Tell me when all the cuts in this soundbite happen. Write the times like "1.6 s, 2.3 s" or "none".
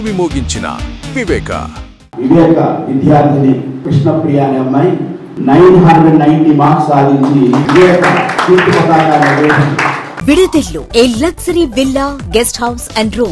none